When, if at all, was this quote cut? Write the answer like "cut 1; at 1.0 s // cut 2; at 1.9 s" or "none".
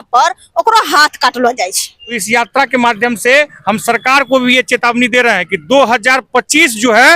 cut 1; at 2.2 s